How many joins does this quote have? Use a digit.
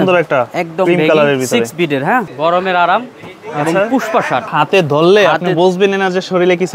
2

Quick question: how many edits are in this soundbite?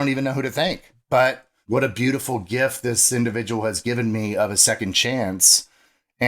2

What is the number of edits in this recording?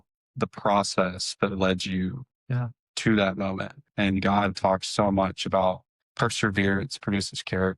1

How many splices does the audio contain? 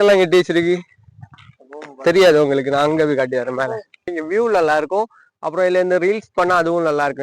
1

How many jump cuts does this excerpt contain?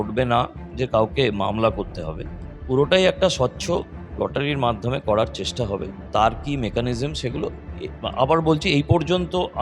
0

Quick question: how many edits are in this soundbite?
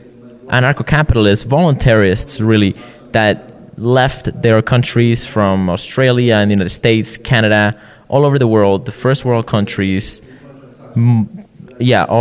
0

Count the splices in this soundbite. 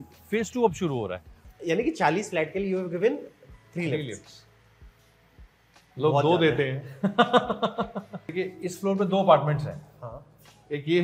2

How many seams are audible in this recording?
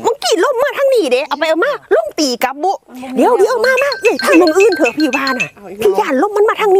1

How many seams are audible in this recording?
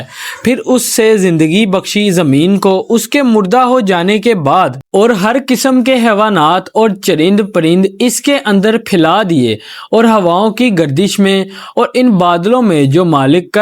0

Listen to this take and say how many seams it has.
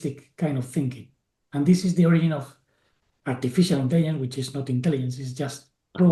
0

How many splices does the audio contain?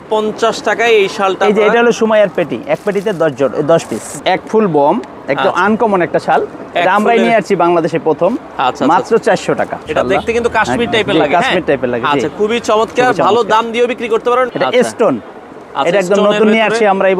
3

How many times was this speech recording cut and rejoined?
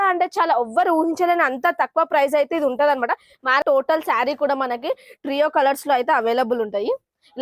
1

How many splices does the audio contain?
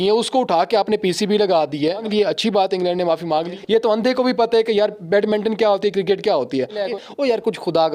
3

